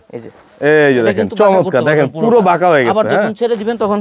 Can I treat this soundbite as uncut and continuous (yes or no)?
yes